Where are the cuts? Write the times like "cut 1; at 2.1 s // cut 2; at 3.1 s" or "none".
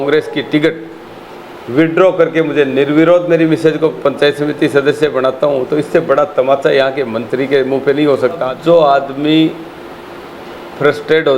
cut 1; at 8.5 s